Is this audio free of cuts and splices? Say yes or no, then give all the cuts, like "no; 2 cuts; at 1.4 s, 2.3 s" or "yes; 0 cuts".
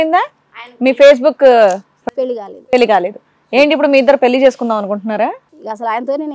yes; 0 cuts